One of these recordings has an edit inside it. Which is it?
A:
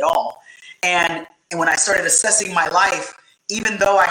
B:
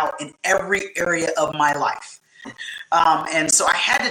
B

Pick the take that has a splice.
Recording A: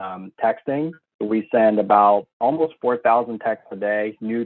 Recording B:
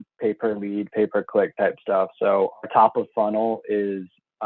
A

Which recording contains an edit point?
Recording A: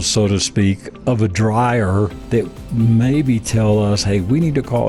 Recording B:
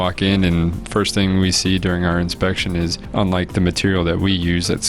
B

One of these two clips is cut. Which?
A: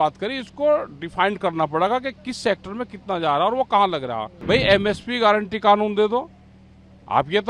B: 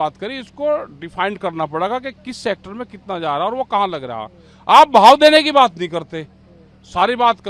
A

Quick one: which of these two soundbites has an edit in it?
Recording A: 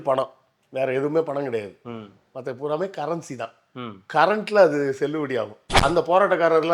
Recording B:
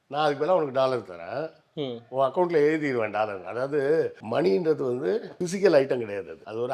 A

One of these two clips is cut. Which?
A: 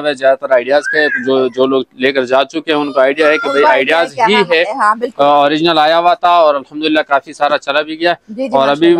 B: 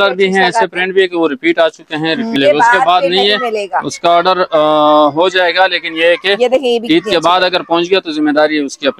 B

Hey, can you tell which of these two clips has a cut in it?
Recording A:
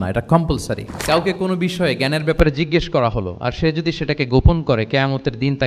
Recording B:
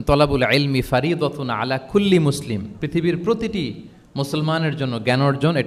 A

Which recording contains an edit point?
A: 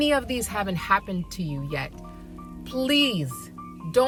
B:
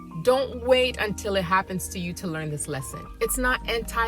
B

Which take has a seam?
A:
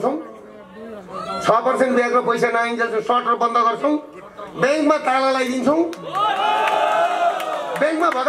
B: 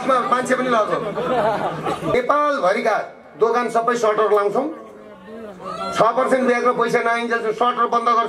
B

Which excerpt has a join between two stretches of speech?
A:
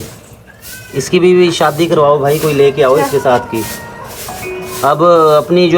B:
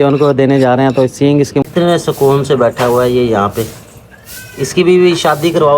B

